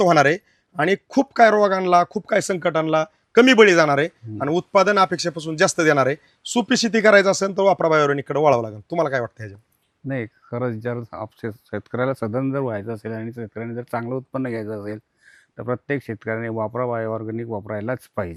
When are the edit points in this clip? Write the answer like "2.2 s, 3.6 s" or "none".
none